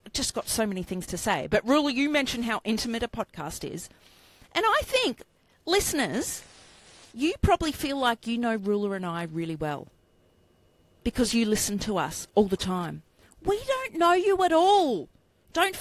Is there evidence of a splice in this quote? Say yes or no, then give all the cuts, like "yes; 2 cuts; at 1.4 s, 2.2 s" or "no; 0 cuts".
no; 0 cuts